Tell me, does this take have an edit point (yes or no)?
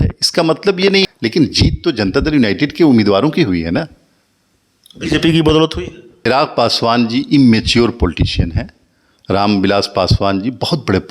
yes